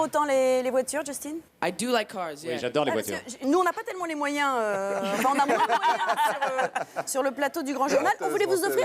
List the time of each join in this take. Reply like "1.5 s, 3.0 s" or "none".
1.5 s